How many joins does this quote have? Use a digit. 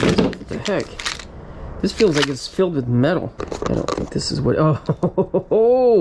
1